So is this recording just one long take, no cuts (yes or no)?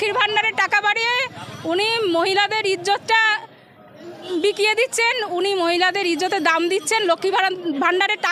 yes